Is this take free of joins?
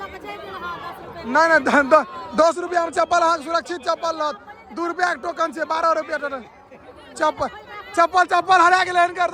yes; 0 cuts

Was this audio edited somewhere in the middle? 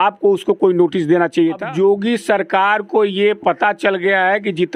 yes; 1 cut; at 1.6 s

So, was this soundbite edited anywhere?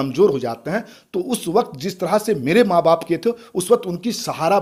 no; 0 cuts

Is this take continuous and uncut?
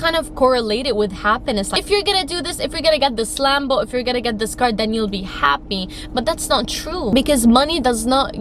yes; 0 cuts

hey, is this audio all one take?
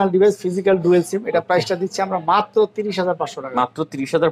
yes; 0 cuts

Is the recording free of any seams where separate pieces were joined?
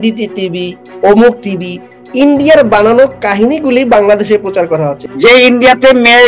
no; 1 cut; at 5.0 s

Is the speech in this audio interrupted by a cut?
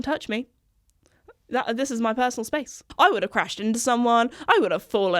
yes; 1 cut; at 2.8 s

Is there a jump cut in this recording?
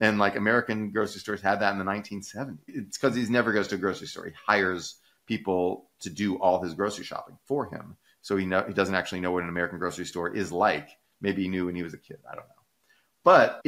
yes; 1 cut; at 2.8 s

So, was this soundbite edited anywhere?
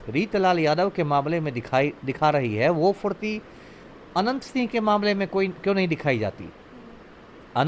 no; 0 cuts

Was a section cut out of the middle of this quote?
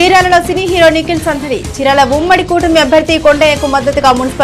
no; 0 cuts

